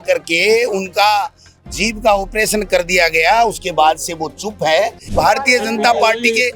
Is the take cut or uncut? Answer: cut